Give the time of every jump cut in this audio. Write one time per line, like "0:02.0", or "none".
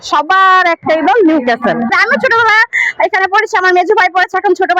0:01.9